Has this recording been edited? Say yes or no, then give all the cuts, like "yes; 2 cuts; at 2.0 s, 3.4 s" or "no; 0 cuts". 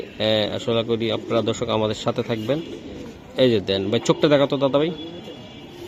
no; 0 cuts